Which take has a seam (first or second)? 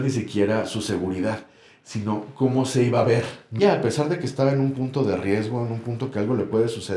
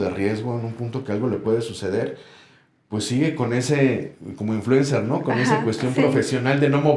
first